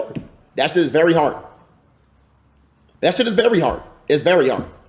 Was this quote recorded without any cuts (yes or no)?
no